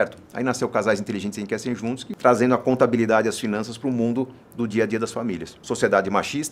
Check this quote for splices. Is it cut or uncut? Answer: cut